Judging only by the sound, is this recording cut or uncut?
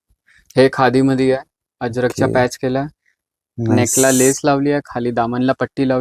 uncut